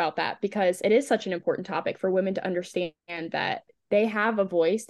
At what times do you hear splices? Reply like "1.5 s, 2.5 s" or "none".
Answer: none